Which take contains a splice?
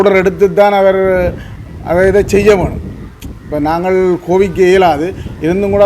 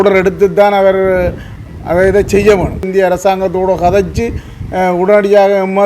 second; 1 cut; at 2.9 s

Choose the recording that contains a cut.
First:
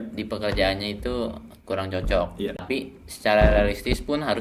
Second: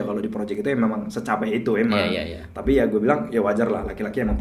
first; 1 cut; at 2.6 s

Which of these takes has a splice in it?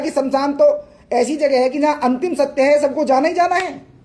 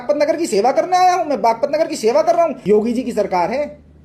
second; 1 cut; at 2.6 s

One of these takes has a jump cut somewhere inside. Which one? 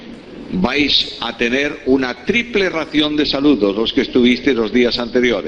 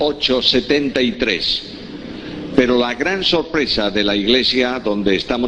first; 1 cut; at 1.1 s

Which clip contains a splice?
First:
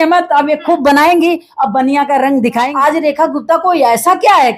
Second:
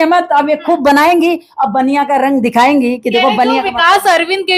first; 1 cut; at 2.7 s

